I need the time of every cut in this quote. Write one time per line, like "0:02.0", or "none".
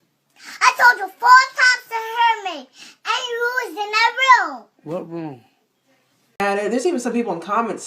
0:06.4